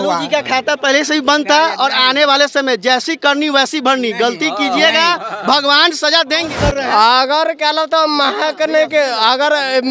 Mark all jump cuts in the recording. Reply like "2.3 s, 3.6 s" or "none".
6.4 s